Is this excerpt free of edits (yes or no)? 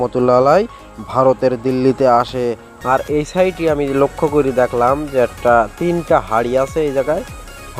no